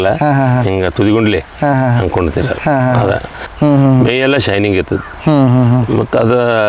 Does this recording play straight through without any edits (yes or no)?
no